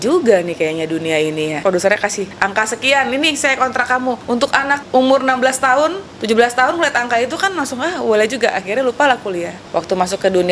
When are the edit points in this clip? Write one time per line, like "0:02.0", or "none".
0:01.6
0:02.3
0:04.3
0:06.1
0:09.6